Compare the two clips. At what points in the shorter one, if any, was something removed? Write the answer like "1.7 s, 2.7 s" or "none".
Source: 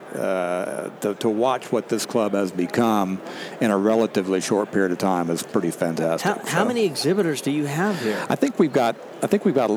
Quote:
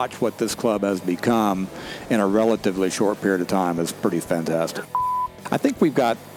5.0 s